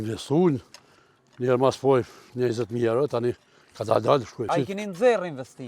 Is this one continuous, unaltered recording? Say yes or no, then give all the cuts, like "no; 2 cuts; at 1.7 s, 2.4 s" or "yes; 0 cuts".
no; 1 cut; at 4.4 s